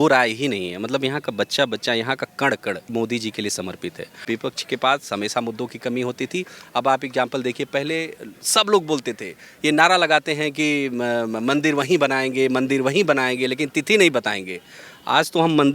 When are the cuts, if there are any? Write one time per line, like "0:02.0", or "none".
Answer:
0:02.9
0:04.2